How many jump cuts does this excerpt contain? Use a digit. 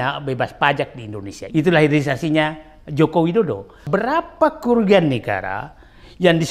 2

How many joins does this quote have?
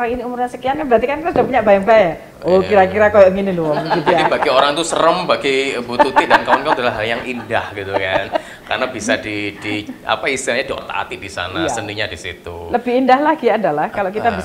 1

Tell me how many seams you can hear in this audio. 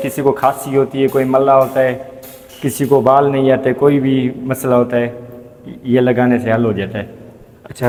0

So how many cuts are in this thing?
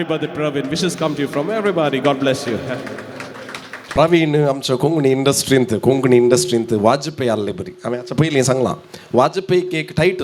1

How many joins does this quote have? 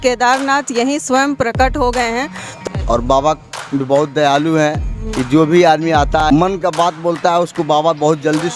2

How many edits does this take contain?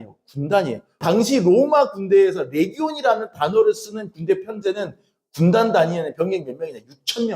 1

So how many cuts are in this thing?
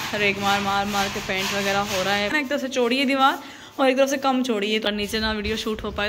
2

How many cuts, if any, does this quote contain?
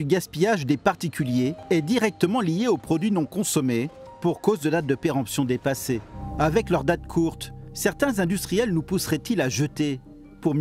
3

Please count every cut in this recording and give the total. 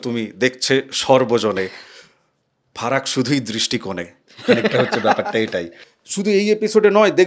1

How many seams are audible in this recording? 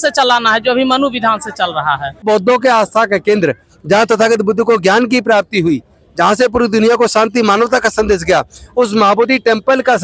1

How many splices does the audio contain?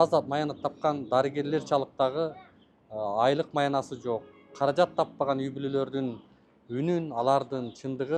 0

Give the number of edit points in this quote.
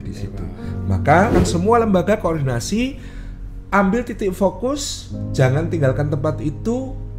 1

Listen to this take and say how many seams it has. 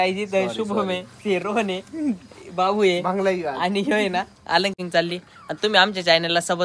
1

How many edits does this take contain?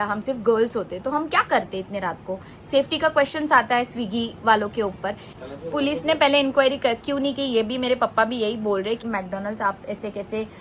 2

